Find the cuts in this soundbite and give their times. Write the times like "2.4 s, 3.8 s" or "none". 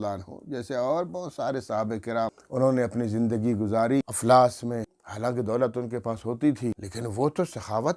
2.4 s, 4.1 s, 5.0 s, 6.9 s